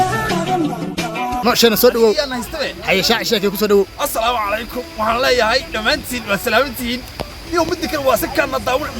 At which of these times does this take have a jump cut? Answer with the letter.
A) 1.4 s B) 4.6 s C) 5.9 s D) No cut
A